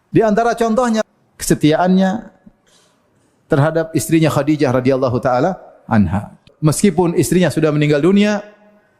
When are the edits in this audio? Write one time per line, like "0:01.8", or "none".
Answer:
0:01.0
0:06.4